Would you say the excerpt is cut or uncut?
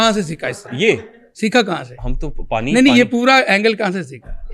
uncut